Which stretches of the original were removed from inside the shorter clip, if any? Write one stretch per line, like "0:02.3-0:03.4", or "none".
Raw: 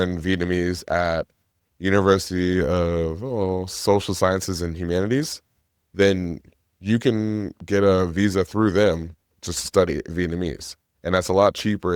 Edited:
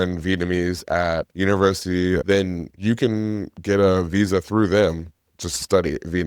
0:01.3-0:01.7
0:02.7-0:06.3